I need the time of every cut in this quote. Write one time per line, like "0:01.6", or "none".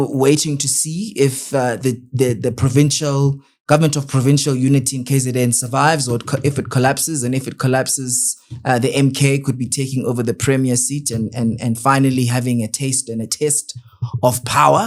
none

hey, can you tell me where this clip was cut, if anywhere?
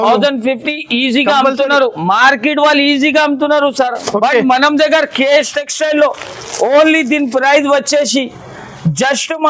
none

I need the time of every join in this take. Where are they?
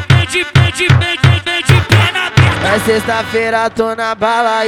0:01.2

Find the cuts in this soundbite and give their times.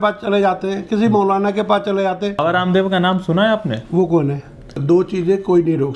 0:02.4
0:04.8

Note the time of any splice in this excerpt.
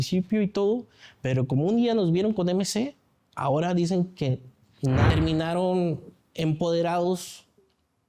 0:05.1

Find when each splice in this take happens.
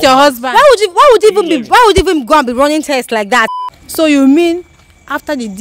0:03.5

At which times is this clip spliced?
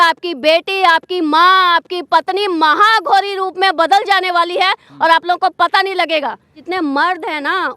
0:06.6

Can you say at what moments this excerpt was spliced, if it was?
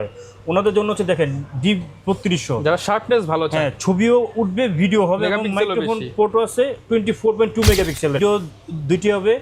0:08.2

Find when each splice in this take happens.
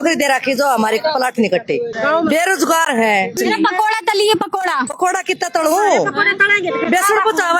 0:01.9
0:03.4
0:04.9

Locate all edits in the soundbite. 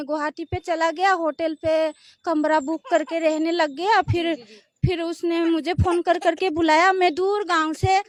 none

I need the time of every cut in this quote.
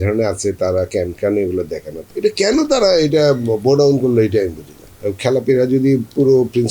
0:02.0
0:04.9

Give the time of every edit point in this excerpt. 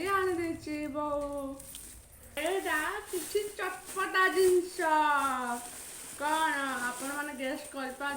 0:02.4

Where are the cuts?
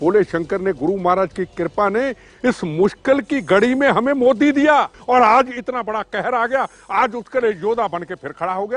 0:05.0

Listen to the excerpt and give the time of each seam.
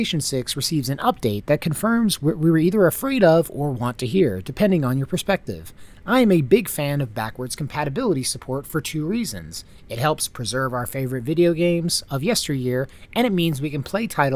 none

